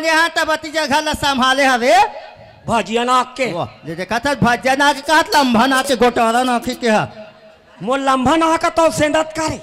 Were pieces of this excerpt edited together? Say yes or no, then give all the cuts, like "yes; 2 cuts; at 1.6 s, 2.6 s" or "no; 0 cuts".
no; 0 cuts